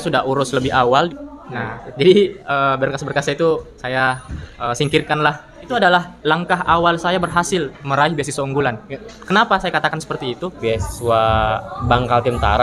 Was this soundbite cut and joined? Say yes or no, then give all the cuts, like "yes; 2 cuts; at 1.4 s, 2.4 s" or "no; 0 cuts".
yes; 3 cuts; at 1.1 s, 5.7 s, 10.6 s